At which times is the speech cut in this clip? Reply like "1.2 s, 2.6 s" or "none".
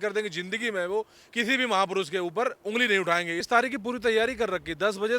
3.4 s